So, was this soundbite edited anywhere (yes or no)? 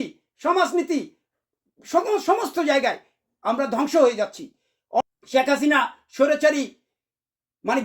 yes